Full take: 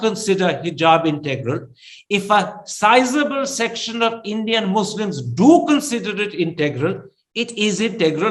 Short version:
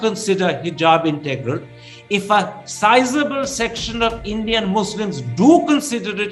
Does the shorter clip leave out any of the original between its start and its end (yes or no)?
no